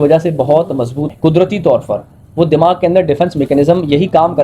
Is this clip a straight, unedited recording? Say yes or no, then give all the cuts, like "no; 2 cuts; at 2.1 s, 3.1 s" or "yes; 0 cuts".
no; 1 cut; at 1.1 s